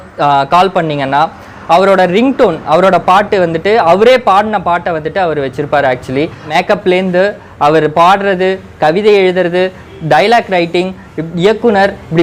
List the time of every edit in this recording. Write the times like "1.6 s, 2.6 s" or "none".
6.5 s